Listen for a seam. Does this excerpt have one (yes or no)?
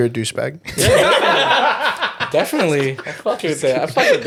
no